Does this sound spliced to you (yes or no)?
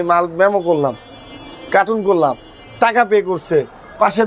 no